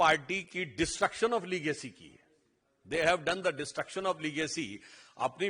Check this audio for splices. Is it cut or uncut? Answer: uncut